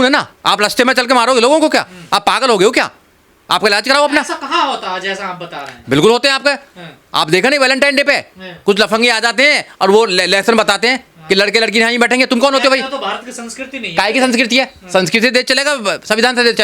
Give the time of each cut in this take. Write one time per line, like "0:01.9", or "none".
none